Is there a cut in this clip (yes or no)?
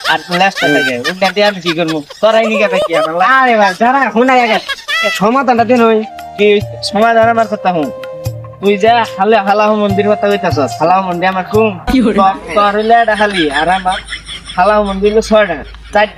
no